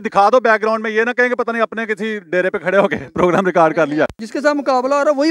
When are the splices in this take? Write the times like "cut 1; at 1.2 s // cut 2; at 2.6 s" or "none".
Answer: cut 1; at 4.2 s